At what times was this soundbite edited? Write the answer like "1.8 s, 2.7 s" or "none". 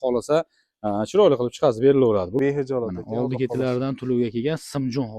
2.4 s